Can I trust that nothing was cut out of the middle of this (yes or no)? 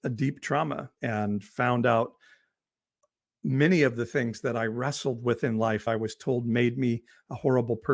no